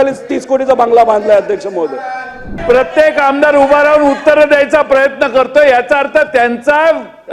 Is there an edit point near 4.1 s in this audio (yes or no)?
no